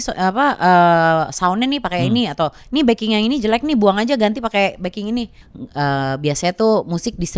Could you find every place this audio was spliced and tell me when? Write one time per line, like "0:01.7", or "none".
0:05.4